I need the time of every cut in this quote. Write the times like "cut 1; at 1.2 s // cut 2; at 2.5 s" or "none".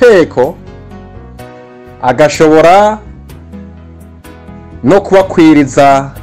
cut 1; at 3.0 s // cut 2; at 4.5 s